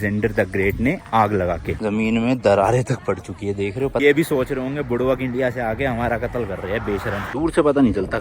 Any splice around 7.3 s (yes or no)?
yes